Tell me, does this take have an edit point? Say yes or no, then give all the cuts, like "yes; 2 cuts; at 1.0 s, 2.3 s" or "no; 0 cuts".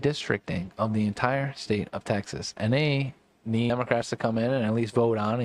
yes; 1 cut; at 3.7 s